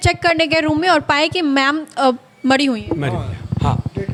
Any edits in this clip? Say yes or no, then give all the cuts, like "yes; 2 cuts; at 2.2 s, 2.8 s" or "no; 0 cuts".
no; 0 cuts